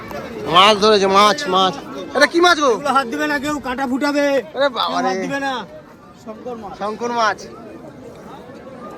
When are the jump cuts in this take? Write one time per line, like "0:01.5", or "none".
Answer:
none